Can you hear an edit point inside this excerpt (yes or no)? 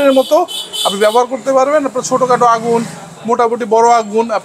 no